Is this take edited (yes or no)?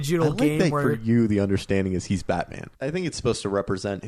yes